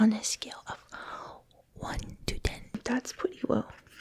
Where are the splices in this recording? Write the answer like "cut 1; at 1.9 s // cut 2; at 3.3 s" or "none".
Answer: cut 1; at 2.8 s